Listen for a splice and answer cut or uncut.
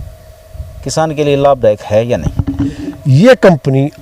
cut